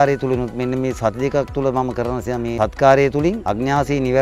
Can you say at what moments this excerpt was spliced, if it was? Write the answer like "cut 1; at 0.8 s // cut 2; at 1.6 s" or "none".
cut 1; at 2.5 s // cut 2; at 3.4 s